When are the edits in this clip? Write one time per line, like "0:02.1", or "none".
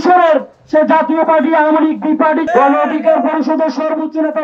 0:02.4